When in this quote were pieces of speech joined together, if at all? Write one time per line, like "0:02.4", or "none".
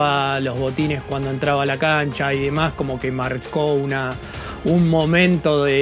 none